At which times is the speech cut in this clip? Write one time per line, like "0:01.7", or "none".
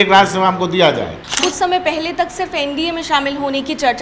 0:01.2